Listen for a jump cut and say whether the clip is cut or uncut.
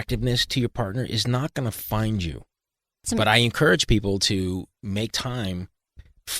cut